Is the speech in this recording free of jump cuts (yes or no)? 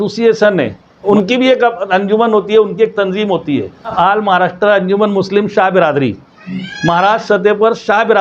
no